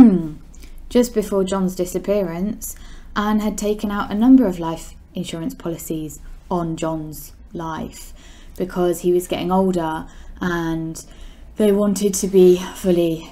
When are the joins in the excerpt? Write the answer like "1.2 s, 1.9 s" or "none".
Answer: none